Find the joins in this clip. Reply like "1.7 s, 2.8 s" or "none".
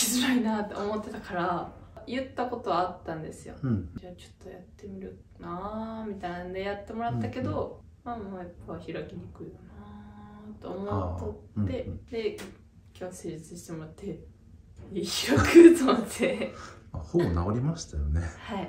2.0 s, 3.9 s, 7.9 s, 12.0 s